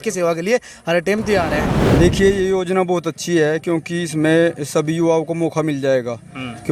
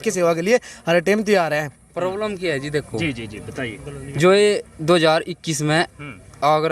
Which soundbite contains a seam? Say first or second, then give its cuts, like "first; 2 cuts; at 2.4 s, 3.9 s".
first; 1 cut; at 1.8 s